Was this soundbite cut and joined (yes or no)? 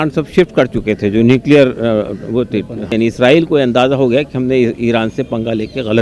yes